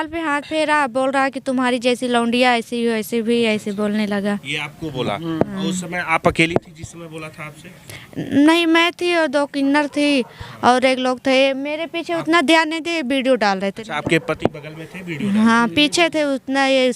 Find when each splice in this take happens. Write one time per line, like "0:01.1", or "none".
none